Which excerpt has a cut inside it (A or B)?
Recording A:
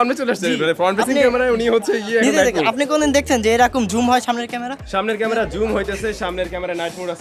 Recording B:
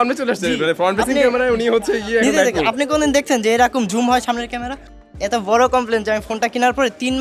B